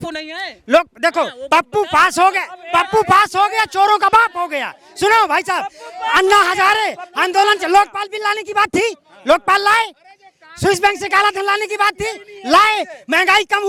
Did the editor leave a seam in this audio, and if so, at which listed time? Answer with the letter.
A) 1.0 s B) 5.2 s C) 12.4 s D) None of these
D